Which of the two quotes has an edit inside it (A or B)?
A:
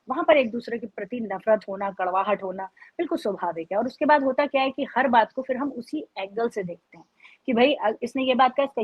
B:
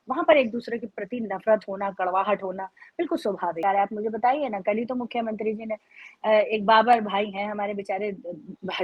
B